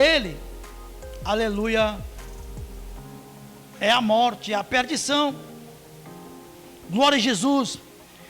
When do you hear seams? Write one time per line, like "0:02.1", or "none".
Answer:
0:02.0
0:03.8